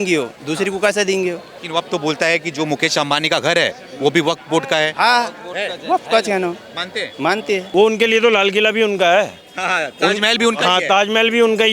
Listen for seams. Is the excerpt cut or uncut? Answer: cut